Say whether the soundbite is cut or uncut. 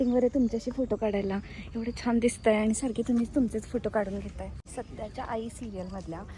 cut